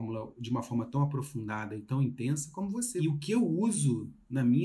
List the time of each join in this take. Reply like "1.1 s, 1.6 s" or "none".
2.9 s